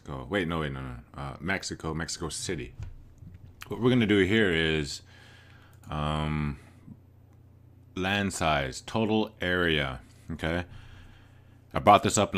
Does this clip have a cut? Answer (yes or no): no